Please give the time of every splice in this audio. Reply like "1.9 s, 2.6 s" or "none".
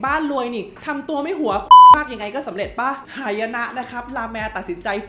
3.0 s